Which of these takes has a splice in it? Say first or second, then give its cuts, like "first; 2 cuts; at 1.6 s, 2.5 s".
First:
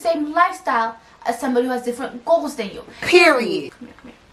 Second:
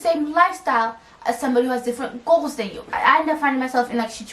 second; 1 cut; at 2.8 s